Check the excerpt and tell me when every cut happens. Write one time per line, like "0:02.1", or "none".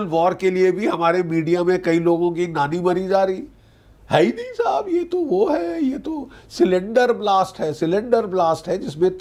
none